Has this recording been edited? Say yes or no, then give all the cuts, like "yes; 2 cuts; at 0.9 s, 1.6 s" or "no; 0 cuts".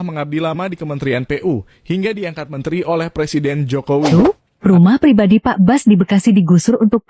yes; 1 cut; at 4.1 s